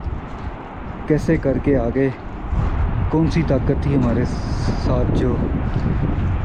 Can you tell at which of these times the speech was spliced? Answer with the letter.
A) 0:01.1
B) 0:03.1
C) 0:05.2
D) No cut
D